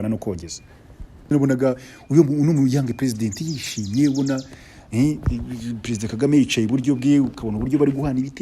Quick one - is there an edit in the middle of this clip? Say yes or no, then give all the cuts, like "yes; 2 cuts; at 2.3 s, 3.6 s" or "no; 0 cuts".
yes; 1 cut; at 1.3 s